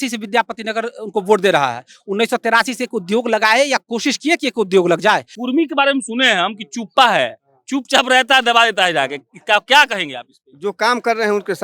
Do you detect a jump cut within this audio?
yes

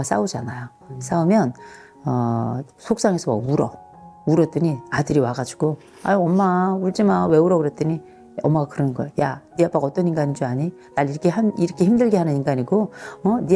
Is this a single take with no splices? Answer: yes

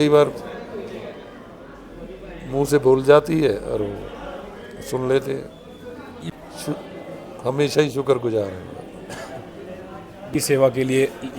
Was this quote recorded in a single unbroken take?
no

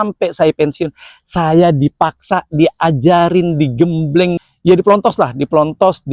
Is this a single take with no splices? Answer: no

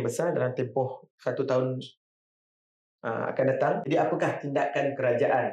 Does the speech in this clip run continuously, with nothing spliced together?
no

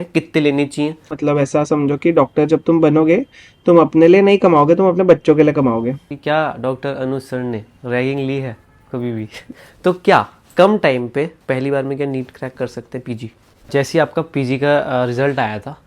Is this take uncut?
no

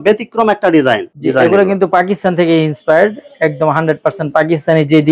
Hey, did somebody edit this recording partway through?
yes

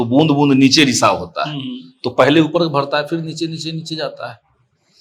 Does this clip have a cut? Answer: no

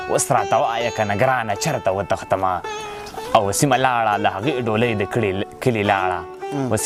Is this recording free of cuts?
yes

